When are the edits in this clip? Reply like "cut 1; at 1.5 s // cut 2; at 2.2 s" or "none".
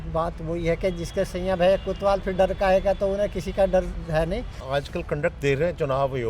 cut 1; at 4.6 s